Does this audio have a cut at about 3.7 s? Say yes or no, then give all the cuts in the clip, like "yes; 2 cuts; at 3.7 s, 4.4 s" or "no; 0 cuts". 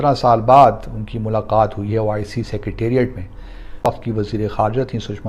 yes; 1 cut; at 3.7 s